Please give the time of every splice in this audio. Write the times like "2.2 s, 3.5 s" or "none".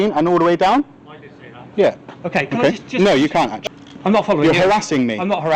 3.6 s